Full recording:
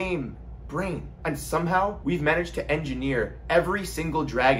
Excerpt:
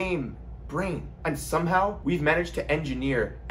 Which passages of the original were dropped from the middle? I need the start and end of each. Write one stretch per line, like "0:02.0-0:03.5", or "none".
none